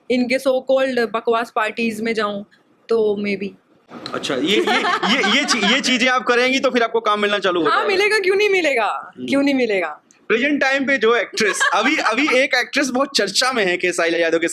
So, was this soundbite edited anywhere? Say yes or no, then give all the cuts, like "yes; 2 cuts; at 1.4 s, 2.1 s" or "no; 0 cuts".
no; 0 cuts